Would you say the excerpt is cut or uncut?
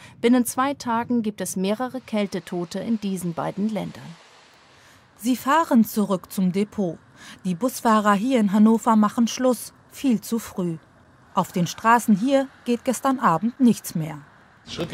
uncut